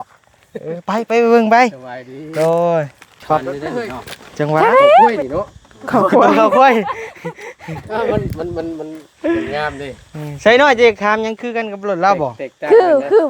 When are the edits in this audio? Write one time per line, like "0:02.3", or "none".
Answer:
0:05.2